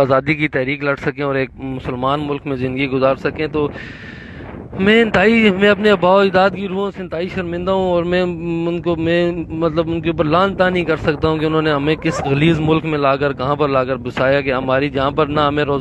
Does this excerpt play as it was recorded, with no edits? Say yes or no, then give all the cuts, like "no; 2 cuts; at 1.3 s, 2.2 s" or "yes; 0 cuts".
yes; 0 cuts